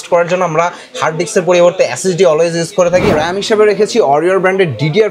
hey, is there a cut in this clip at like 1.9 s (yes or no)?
no